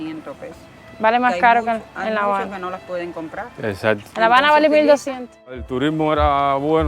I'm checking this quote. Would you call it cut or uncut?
cut